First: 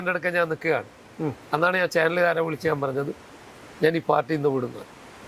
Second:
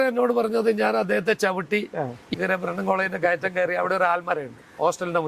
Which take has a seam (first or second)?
second